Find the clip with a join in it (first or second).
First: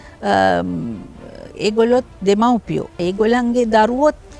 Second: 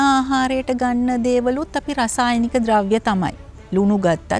first